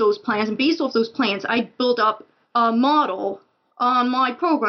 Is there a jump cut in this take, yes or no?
no